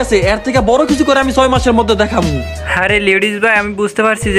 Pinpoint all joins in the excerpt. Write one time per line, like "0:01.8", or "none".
none

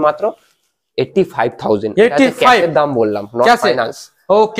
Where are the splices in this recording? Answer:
none

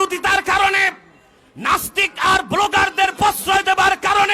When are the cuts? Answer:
none

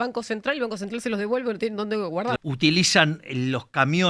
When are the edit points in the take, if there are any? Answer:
0:02.4

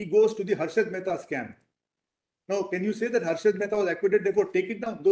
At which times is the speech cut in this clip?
none

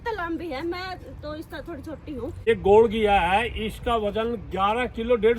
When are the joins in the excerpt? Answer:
0:02.5

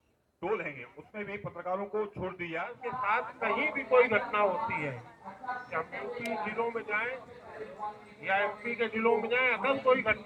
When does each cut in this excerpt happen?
0:02.9

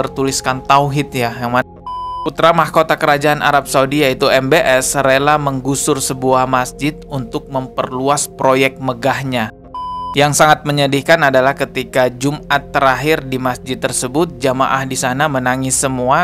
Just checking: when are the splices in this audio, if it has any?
0:02.0
0:09.5

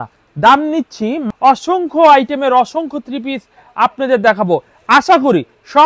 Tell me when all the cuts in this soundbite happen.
0:01.2

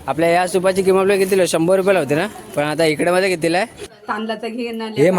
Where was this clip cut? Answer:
0:03.8

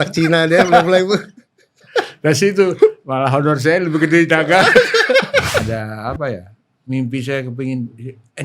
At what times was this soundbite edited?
0:05.7

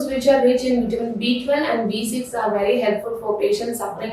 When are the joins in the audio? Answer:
none

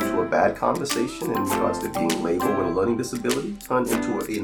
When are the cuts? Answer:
none

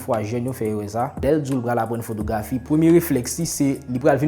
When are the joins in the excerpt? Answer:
0:01.2

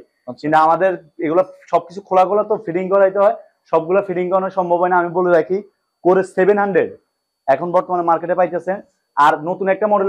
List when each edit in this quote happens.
none

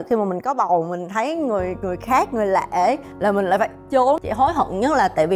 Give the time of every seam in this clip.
0:04.2

